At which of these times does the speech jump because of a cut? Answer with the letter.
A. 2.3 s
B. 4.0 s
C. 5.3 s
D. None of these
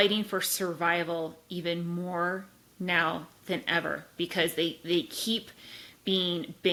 D